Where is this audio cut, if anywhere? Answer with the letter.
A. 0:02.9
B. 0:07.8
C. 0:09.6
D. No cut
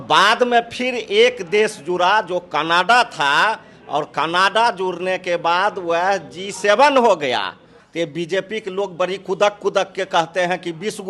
B